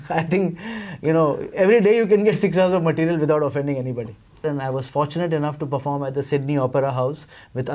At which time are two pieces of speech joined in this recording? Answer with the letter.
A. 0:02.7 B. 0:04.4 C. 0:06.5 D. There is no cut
B